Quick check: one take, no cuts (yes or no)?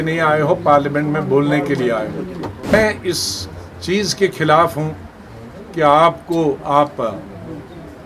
no